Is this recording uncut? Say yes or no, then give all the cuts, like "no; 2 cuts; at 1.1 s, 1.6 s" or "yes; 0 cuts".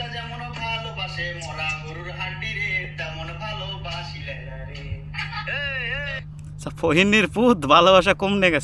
no; 1 cut; at 6.2 s